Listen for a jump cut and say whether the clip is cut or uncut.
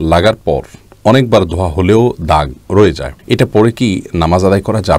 cut